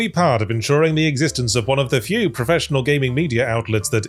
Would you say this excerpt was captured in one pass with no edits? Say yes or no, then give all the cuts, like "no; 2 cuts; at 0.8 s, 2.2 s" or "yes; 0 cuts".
yes; 0 cuts